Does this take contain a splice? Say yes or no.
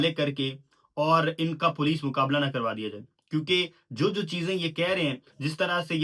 no